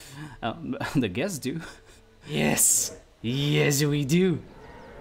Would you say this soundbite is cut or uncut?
cut